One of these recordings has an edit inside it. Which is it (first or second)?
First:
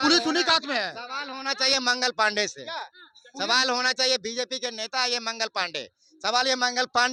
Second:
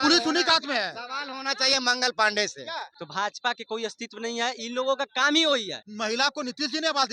second